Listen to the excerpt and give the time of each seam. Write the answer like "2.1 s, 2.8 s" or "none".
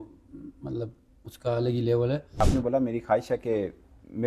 2.4 s